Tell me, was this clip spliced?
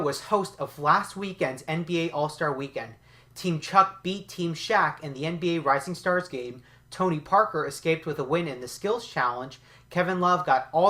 yes; 1 cut; at 8.0 s

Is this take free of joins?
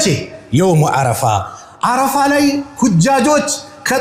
yes; 0 cuts

